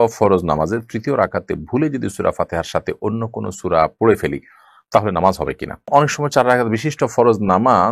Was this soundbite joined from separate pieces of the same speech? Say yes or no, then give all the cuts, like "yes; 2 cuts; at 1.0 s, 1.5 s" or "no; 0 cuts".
yes; 1 cut; at 5.9 s